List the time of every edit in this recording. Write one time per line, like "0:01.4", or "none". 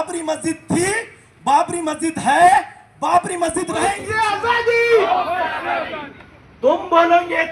0:04.1